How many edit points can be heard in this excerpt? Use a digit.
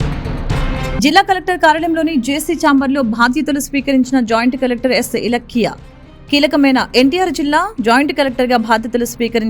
1